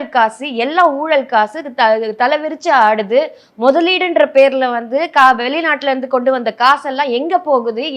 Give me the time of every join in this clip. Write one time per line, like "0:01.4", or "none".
none